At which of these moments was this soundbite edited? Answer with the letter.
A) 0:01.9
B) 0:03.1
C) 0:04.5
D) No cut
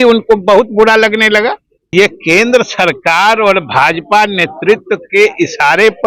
A